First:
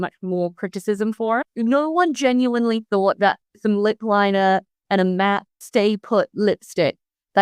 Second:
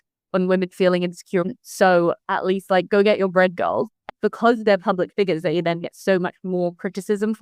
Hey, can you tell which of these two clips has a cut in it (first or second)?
first